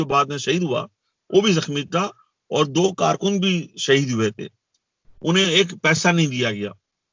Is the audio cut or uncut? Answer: uncut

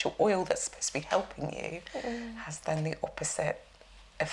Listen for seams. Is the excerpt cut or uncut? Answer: uncut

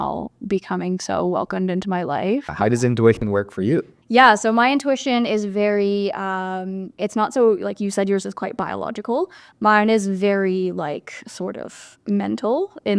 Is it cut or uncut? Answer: cut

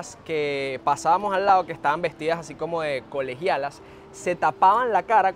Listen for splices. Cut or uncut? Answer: uncut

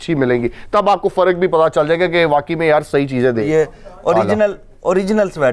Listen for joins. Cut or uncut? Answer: cut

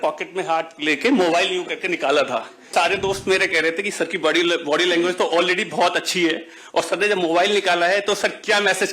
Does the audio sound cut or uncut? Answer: cut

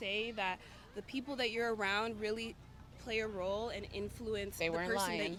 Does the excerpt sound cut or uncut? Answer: uncut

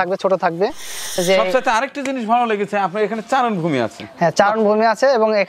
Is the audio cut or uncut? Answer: cut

